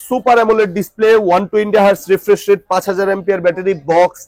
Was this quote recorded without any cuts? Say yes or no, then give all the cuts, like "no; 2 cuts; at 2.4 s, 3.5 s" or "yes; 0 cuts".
yes; 0 cuts